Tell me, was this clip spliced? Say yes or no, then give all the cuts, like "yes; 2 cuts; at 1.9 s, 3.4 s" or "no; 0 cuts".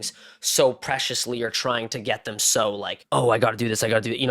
yes; 1 cut; at 2.9 s